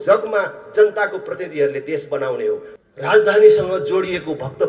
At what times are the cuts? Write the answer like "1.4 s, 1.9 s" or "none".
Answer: 2.7 s